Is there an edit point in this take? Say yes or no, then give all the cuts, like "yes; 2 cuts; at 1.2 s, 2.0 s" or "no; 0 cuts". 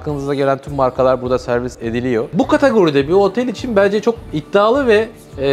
yes; 1 cut; at 2.3 s